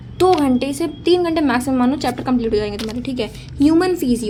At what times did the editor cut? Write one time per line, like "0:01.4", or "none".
none

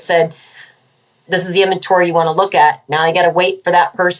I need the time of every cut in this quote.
0:01.3

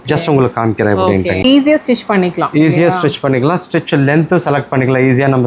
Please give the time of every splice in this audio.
0:01.4

